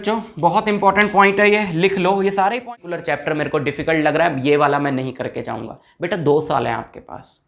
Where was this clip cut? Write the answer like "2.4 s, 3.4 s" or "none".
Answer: 2.6 s